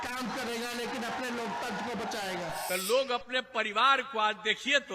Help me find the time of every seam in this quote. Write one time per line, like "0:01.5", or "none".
0:02.6